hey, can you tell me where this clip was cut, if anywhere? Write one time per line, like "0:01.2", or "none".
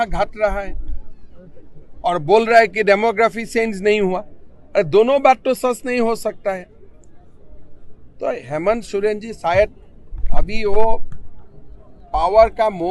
none